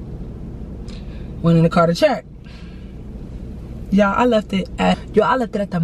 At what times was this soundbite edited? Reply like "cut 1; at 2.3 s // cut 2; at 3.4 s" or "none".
none